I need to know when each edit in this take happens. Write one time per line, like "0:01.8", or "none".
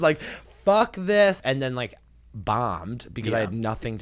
0:01.4